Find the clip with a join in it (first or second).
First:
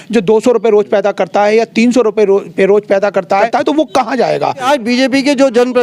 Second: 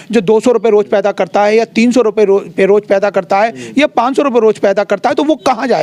first